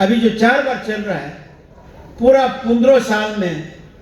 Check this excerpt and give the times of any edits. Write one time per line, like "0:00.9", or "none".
none